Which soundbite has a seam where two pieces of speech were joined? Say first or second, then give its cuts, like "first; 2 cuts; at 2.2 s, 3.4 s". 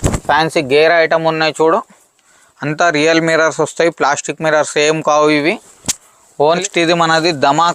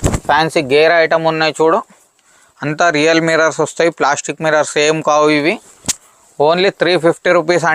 first; 1 cut; at 6.6 s